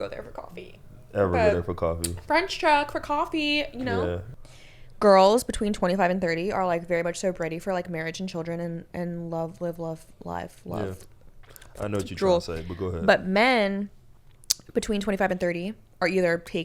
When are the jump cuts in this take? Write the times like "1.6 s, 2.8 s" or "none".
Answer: 4.3 s